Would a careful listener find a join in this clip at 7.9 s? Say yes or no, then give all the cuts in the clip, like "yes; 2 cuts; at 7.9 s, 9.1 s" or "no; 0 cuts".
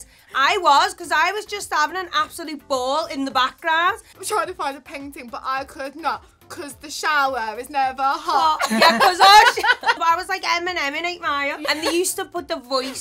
no; 3 cuts; at 4.1 s, 10.0 s, 11.6 s